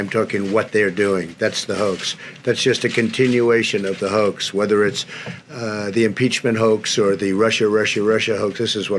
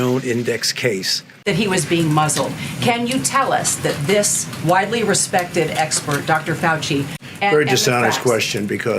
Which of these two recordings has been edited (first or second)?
second